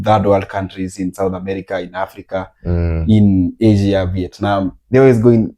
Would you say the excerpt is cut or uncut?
uncut